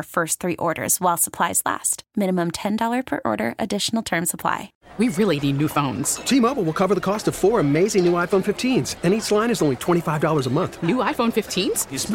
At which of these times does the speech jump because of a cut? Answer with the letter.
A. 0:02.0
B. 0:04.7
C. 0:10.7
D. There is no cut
B